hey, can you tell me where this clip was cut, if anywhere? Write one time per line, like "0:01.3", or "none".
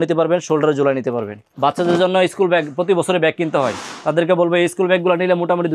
0:01.4